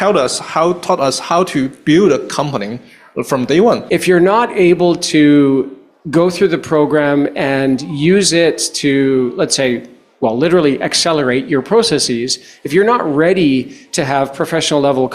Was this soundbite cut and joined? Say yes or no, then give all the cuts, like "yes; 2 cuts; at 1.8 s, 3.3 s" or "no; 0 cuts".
yes; 1 cut; at 3.8 s